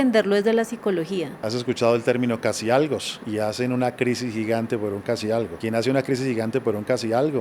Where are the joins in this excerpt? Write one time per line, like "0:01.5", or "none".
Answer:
0:01.5
0:03.1
0:05.5